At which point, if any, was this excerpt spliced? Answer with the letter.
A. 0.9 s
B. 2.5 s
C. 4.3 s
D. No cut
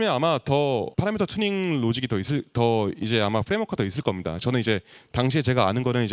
A